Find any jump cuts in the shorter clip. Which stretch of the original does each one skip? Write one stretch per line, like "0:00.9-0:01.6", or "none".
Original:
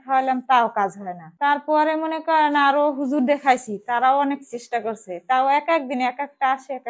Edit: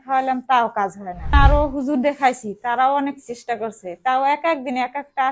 0:01.3-0:02.6